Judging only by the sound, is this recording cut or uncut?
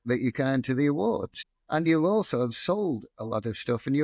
cut